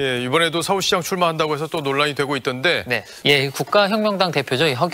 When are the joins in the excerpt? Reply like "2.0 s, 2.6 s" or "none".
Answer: 3.1 s